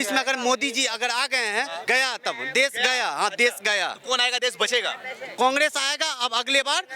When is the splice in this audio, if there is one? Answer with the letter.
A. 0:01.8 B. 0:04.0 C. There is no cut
A